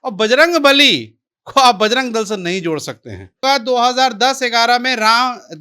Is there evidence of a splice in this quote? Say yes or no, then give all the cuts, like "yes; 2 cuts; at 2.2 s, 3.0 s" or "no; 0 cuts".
yes; 1 cut; at 3.4 s